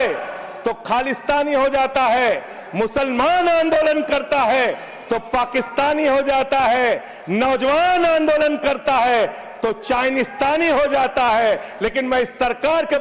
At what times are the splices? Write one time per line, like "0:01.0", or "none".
none